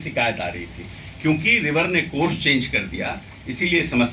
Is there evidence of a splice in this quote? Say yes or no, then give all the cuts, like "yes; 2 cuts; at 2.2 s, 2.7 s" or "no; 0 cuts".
no; 0 cuts